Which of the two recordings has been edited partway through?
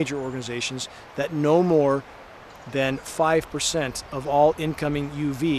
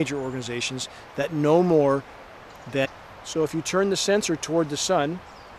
first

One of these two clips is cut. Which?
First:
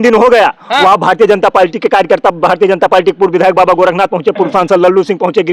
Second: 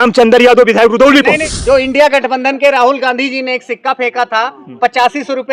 second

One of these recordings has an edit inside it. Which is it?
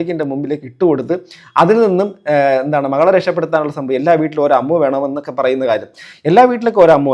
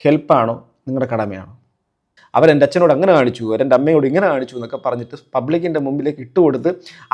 second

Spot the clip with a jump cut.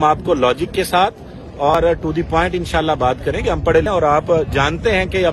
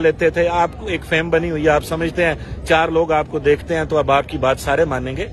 first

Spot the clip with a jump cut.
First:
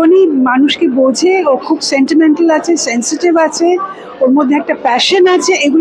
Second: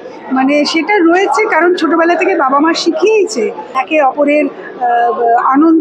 second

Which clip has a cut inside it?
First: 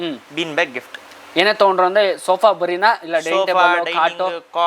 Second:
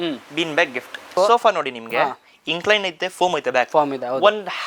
second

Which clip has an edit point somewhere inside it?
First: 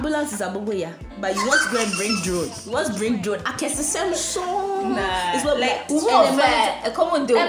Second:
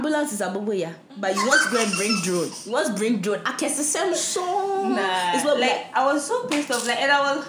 first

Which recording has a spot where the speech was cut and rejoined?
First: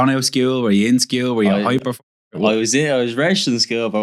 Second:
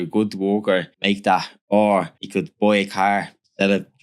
second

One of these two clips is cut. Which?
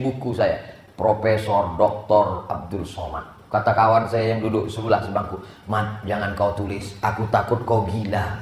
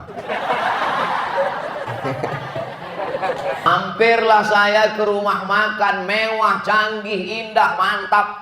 second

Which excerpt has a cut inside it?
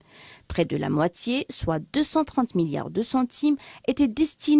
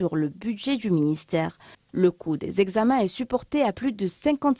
first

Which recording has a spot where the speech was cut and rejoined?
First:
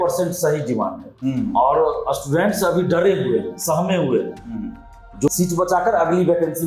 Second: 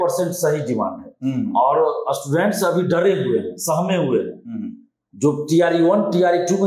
first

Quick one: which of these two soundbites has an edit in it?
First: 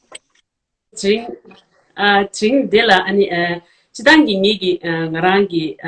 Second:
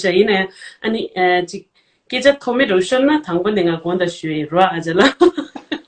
first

